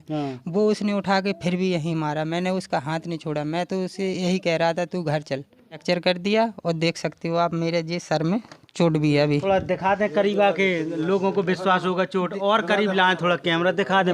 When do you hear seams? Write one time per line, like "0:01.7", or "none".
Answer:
0:05.8

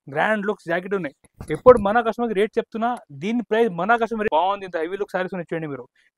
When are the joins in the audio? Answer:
0:04.3

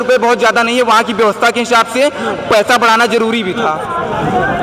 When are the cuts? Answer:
none

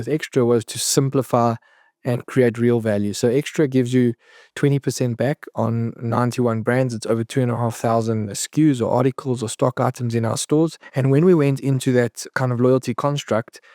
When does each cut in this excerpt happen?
0:08.3
0:10.8
0:12.3

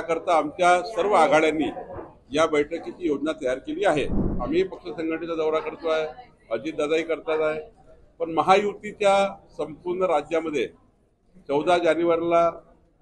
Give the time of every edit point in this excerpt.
0:04.2

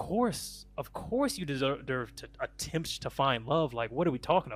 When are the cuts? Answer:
none

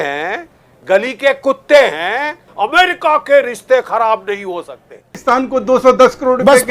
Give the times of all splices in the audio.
0:02.5
0:05.2

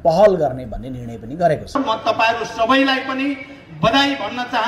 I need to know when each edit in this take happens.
0:01.8

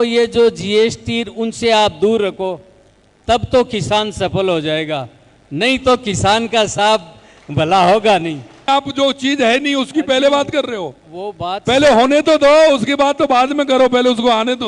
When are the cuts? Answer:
0:08.7

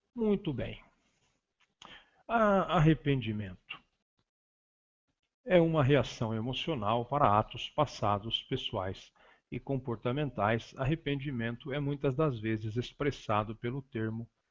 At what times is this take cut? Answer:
none

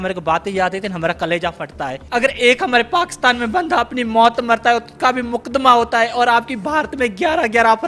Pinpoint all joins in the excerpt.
0:01.9

